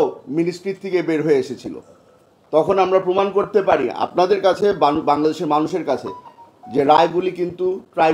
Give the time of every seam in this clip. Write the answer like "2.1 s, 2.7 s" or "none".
none